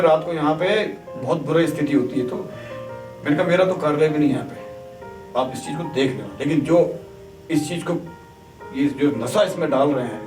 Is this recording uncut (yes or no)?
yes